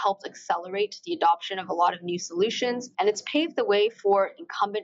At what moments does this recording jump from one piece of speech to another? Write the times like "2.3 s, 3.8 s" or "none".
2.9 s